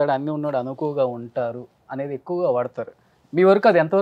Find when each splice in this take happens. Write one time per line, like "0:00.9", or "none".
none